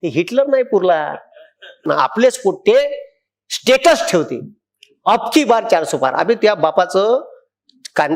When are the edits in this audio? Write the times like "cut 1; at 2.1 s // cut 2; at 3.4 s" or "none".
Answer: cut 1; at 1.9 s